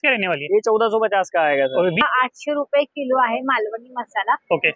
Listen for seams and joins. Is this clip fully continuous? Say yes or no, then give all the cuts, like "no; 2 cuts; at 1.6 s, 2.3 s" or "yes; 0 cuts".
no; 1 cut; at 2.0 s